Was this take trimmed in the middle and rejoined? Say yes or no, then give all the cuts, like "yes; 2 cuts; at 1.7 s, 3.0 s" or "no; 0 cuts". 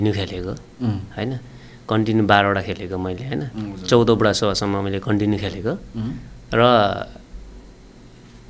no; 0 cuts